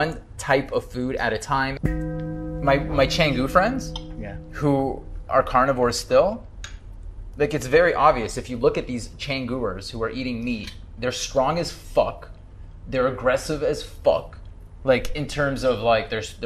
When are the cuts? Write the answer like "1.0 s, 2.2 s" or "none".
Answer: 1.9 s